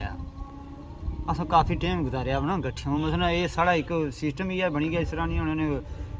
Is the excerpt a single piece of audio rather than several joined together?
yes; 0 cuts

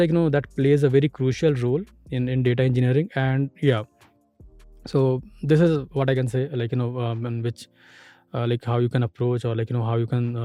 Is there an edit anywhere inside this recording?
no; 0 cuts

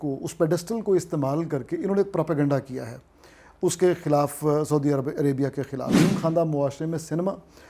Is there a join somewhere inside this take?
yes; 1 cut; at 5.9 s

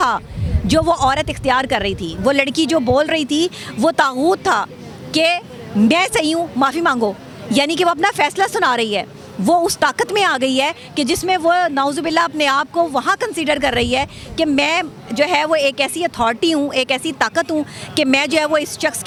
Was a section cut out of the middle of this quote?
no; 0 cuts

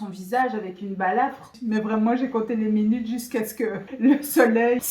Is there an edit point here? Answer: yes; 2 cuts; at 1.6 s, 3.8 s

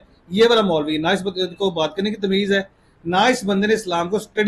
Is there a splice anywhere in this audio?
no; 0 cuts

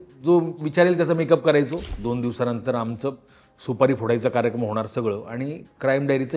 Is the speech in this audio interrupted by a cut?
yes; 1 cut; at 1.9 s

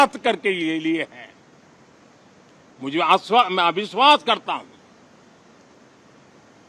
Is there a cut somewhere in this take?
no; 0 cuts

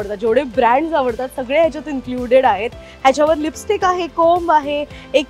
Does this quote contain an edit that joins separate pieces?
no; 0 cuts

